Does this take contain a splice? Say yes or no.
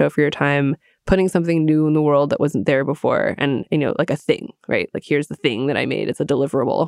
no